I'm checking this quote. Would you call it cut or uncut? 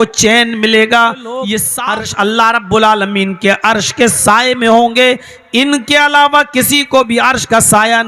cut